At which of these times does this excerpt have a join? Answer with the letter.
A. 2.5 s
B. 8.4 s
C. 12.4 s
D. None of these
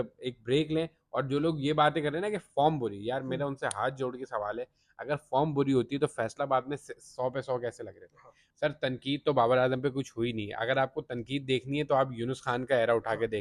B